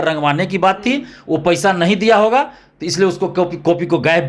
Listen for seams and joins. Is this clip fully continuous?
yes; 0 cuts

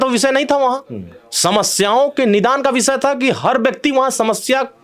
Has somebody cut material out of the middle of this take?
no; 0 cuts

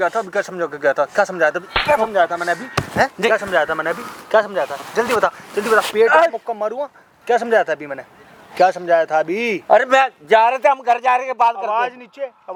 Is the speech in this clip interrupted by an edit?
no; 0 cuts

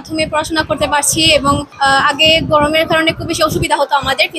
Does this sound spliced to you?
yes; 1 cut; at 1.7 s

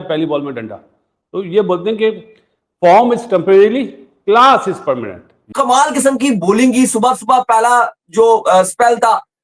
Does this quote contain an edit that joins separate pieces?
yes; 1 cut; at 5.4 s

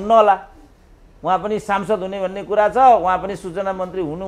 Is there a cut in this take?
no; 0 cuts

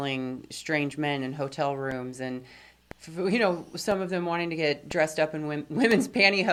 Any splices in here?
no; 0 cuts

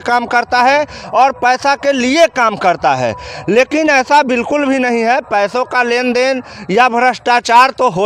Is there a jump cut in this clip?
no; 0 cuts

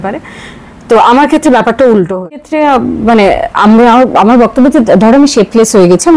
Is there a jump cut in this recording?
yes; 1 cut; at 2.4 s

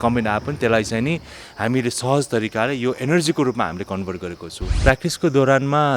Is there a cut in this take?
yes; 1 cut; at 4.7 s

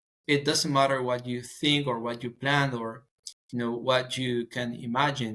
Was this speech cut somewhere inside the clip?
no; 0 cuts

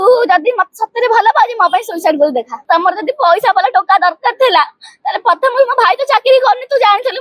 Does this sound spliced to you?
yes; 1 cut; at 2.6 s

